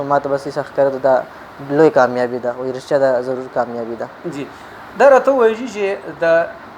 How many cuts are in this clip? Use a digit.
0